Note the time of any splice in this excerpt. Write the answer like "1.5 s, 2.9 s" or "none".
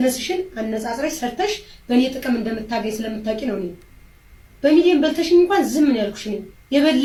none